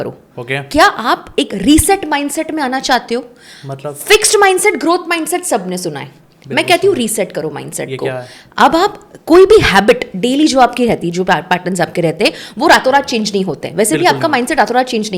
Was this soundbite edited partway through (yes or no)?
no